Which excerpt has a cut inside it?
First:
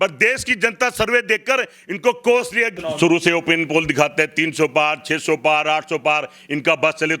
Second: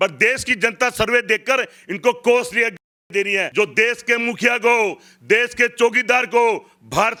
first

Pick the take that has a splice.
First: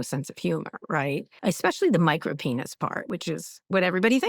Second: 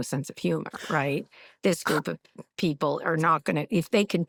first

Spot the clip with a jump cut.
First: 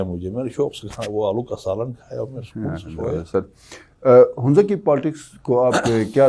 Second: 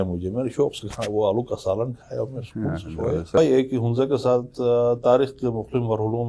second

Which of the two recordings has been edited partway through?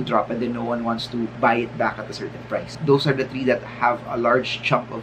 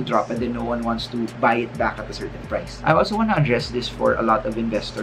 first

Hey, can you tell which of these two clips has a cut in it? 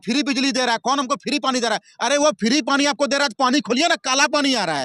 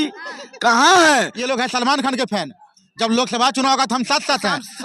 second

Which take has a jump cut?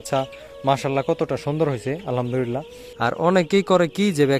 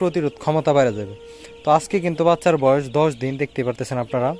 first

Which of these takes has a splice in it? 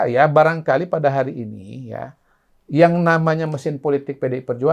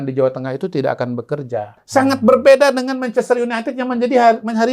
second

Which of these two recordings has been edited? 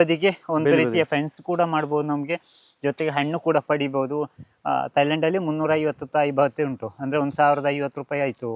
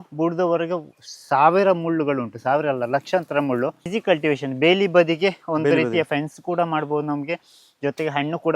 second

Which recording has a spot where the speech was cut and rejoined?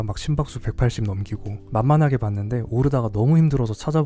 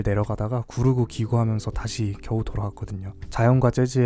second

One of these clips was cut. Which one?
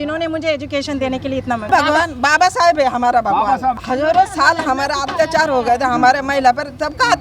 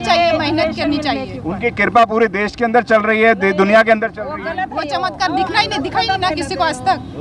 first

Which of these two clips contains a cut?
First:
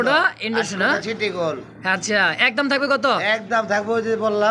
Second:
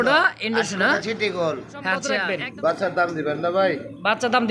second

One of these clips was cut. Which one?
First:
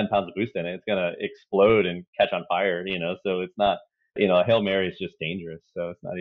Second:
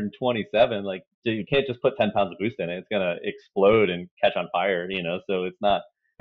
second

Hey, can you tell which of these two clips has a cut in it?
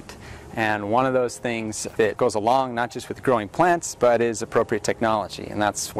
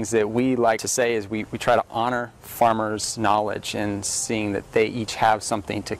first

